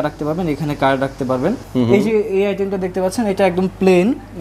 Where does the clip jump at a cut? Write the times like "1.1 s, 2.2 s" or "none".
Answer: 1.6 s